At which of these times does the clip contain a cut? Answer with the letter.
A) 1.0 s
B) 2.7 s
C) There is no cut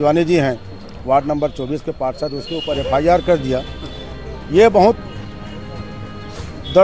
C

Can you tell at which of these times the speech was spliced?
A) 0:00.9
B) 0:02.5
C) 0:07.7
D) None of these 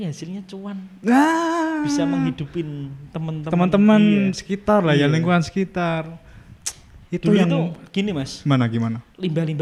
D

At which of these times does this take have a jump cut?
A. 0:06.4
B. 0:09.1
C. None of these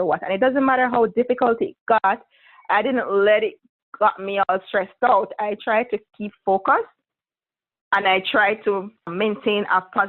B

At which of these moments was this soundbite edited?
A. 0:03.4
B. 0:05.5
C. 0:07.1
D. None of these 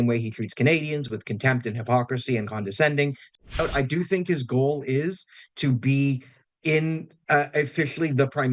A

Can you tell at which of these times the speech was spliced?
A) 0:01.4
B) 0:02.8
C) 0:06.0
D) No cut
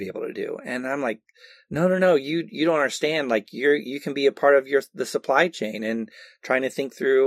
D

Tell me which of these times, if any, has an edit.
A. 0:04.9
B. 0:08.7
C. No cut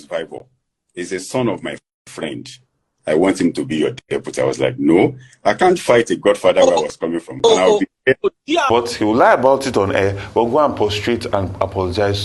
B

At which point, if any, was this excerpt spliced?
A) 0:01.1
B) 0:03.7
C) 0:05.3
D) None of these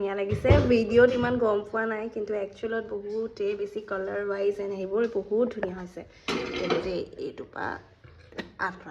D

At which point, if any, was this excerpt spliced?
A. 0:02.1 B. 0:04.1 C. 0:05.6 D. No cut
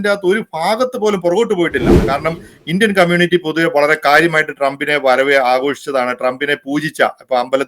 A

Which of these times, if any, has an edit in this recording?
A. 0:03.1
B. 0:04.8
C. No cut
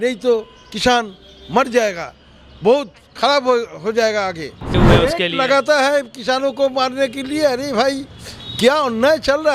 B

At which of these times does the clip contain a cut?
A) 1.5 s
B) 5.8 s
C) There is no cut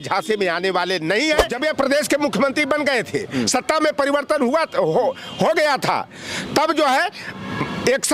A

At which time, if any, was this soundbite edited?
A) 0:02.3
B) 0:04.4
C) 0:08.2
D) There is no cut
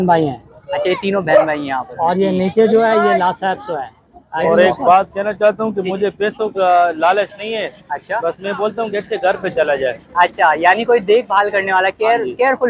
B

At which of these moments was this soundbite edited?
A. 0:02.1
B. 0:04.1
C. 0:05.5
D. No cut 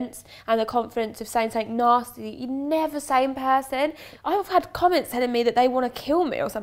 B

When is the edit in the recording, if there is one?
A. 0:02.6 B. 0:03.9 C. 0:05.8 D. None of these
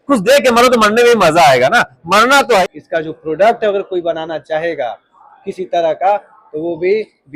A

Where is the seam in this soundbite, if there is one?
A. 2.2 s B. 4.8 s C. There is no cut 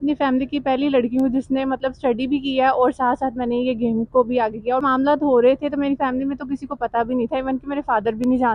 B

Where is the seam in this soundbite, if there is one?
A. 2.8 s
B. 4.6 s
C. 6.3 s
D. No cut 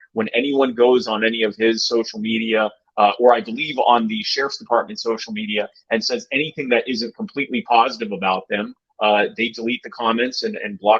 D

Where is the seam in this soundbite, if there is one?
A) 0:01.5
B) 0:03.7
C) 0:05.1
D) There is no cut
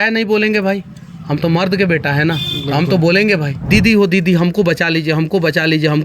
B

